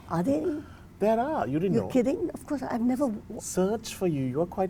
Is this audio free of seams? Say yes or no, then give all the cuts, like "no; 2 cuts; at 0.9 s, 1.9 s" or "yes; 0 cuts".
yes; 0 cuts